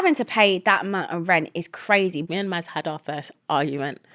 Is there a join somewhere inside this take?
yes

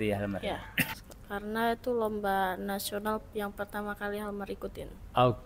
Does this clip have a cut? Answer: yes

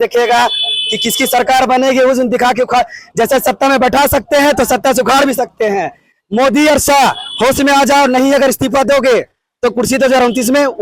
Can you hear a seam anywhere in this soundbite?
no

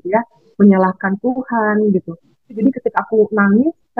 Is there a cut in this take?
yes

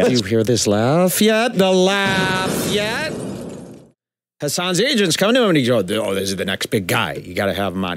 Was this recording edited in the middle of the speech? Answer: yes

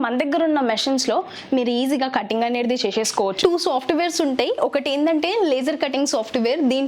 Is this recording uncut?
no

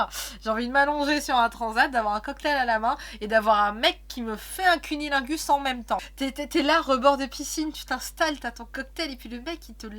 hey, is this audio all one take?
no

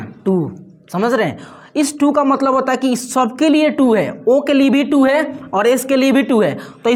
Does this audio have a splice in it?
no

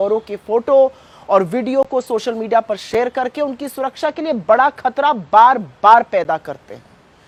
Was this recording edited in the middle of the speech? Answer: no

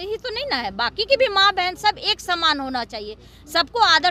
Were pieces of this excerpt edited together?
no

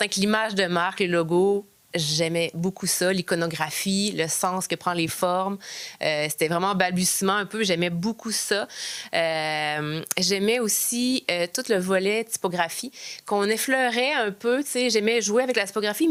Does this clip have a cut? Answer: no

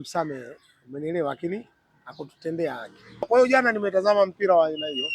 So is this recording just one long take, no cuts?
no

